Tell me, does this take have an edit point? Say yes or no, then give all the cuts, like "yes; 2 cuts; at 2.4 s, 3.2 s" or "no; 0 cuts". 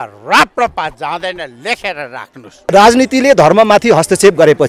yes; 1 cut; at 2.7 s